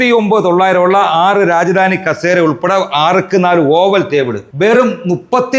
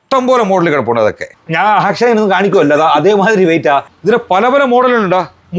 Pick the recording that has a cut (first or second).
second